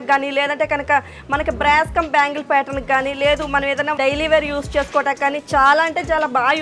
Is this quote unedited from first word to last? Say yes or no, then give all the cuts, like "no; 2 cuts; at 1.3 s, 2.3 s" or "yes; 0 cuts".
yes; 0 cuts